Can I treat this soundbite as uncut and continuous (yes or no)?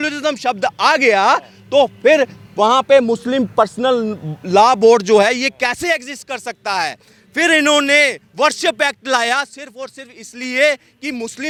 yes